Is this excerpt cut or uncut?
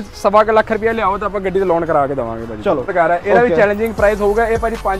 cut